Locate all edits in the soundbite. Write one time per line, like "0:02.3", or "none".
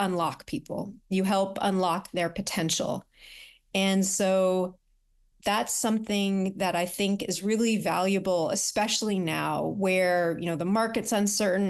none